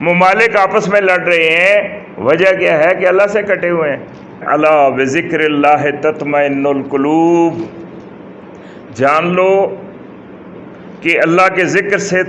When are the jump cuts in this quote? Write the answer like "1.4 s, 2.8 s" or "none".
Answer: 4.4 s